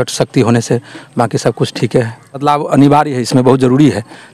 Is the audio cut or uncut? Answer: cut